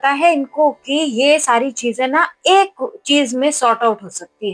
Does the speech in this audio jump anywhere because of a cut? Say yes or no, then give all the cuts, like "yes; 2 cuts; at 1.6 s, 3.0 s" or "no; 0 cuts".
no; 0 cuts